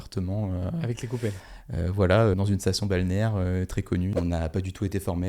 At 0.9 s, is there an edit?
no; 2 cuts; at 2.3 s, 4.1 s

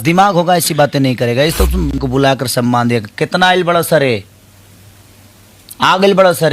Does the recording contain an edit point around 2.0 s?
yes; 1 cut; at 2.0 s

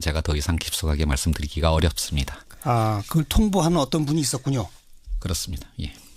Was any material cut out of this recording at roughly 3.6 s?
no; 1 cut; at 1.6 s

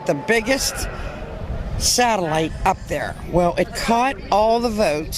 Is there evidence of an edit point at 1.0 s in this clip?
no; 1 cut; at 4.0 s

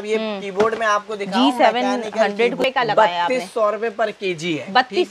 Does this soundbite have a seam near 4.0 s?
no; 1 cut; at 2.6 s

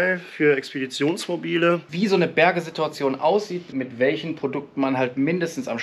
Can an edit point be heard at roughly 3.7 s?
yes; 2 cuts; at 1.9 s, 3.7 s

